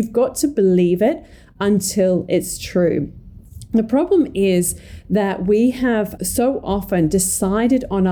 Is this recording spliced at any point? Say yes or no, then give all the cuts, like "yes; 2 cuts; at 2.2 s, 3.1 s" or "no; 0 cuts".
yes; 1 cut; at 6.2 s